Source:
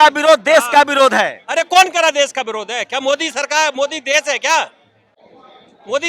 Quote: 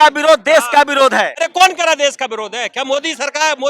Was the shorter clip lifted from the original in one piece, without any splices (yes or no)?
no